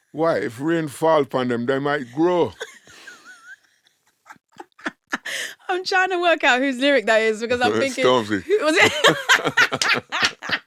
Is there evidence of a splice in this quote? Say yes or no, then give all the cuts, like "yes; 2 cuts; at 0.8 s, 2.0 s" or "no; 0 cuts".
no; 0 cuts